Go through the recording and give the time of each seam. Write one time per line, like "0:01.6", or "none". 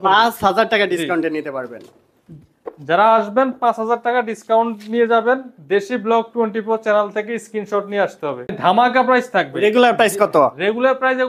0:08.5